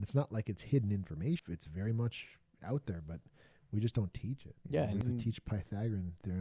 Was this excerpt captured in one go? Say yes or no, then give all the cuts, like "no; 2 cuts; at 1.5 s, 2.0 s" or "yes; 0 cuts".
no; 2 cuts; at 1.4 s, 5.0 s